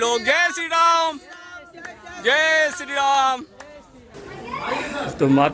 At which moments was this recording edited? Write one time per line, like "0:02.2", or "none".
0:04.3